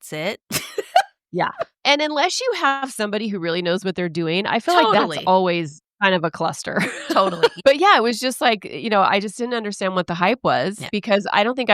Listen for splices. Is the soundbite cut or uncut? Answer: cut